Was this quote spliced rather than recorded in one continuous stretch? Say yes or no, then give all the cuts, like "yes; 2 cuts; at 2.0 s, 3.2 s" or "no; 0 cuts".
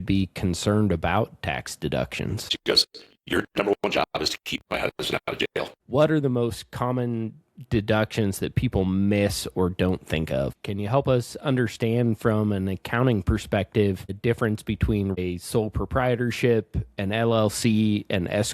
yes; 5 cuts; at 2.6 s, 5.7 s, 10.6 s, 14.1 s, 15.2 s